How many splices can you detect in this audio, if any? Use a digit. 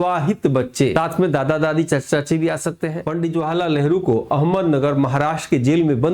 2